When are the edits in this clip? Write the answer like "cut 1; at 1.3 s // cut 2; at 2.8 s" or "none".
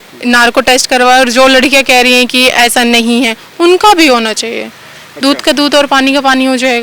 none